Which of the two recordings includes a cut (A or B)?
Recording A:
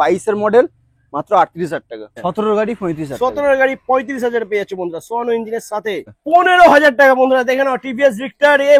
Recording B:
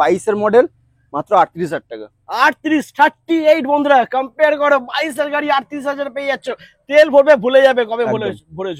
A